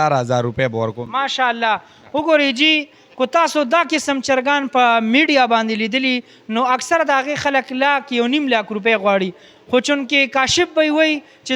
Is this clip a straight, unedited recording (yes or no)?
yes